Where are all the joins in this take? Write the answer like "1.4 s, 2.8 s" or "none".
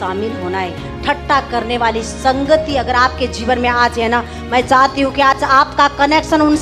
none